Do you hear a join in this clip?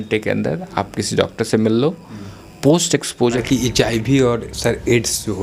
yes; 1 cut; at 3.4 s

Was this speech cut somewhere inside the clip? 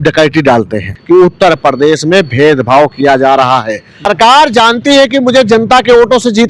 yes; 2 cuts; at 0.9 s, 4.1 s

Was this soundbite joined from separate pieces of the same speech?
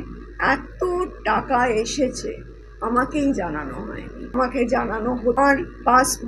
yes; 2 cuts; at 4.3 s, 5.3 s

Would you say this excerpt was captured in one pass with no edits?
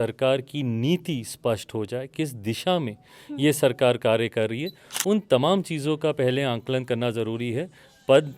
yes; 0 cuts

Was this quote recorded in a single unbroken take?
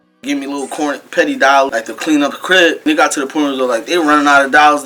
no; 2 cuts; at 1.7 s, 2.8 s

